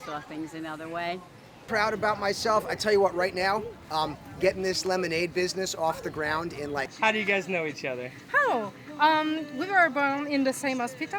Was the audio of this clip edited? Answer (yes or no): yes